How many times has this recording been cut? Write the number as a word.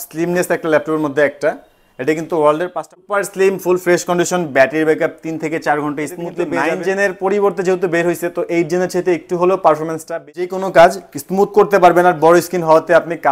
three